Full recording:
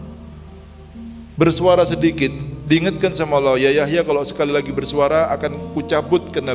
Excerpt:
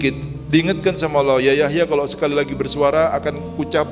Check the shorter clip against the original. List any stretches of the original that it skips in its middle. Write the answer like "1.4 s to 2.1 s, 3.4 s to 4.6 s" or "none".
none